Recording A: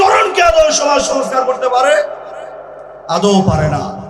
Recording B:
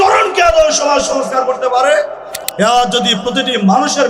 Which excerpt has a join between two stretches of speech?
B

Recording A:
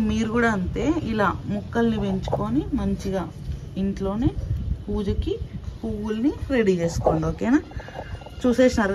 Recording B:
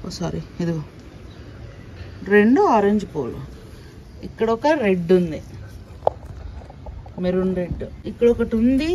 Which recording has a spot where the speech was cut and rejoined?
B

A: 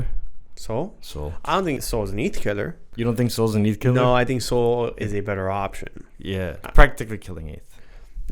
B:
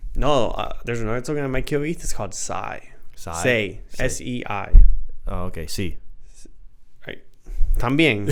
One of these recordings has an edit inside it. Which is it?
A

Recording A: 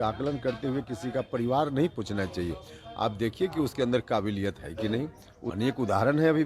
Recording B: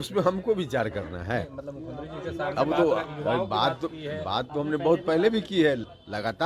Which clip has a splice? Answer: A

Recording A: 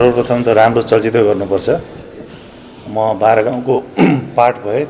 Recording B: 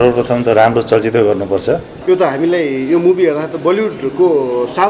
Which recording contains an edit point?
B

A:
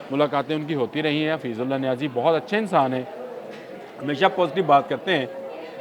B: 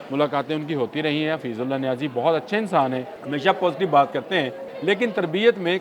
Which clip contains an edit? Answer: B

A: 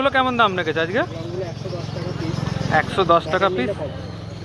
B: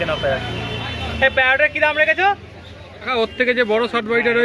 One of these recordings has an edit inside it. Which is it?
B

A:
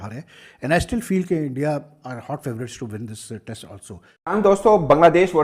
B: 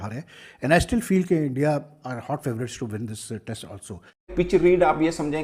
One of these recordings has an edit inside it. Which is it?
B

